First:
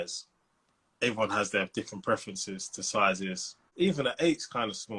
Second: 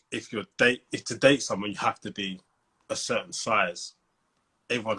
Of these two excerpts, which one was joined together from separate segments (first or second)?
first